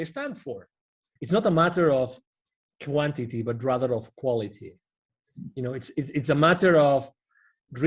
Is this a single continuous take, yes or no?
no